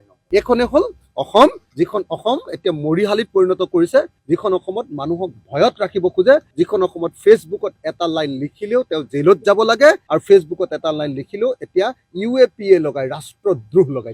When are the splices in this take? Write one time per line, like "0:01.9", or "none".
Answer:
none